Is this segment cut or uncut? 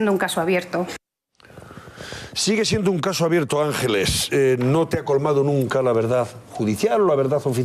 uncut